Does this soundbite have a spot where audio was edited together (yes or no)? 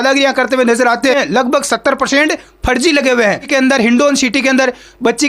yes